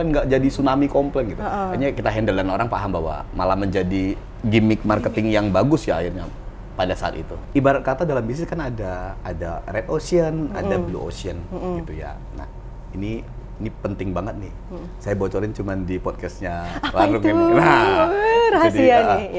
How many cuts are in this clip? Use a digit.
1